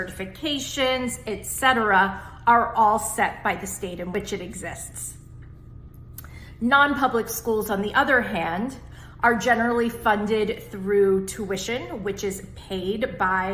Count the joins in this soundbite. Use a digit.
1